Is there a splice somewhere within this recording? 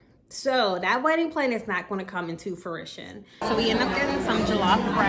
yes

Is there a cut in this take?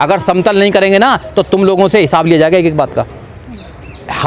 no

